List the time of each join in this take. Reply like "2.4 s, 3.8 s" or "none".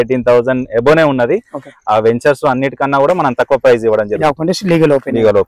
4.2 s